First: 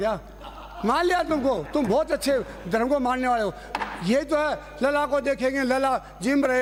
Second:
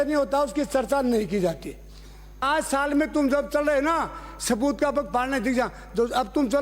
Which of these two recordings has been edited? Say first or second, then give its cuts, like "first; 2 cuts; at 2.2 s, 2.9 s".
second; 1 cut; at 2.5 s